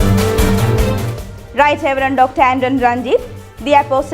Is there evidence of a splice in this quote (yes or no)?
yes